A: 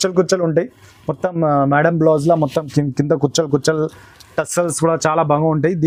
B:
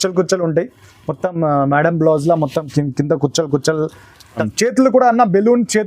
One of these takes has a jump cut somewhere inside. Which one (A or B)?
B